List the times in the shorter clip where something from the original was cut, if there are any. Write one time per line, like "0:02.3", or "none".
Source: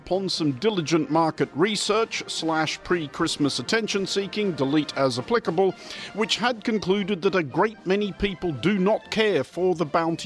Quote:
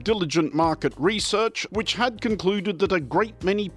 0:01.6